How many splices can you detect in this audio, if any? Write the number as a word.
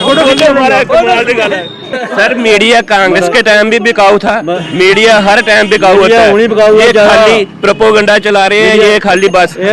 one